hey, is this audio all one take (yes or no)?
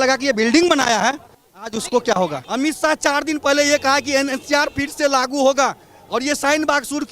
no